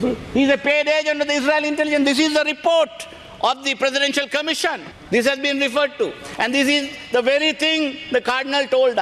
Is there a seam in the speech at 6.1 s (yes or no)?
no